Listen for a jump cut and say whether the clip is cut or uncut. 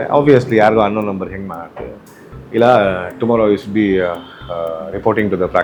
uncut